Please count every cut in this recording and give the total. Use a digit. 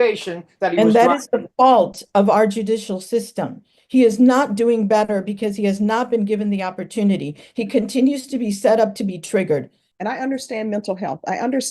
1